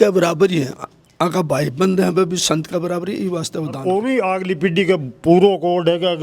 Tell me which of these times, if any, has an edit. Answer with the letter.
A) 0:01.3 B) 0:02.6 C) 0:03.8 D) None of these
C